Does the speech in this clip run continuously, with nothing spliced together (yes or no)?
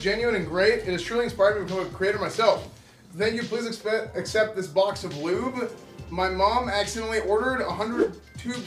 yes